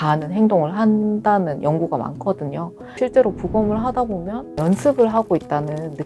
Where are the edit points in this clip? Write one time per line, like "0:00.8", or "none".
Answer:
0:03.0
0:04.6